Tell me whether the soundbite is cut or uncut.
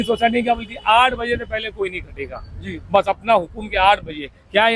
uncut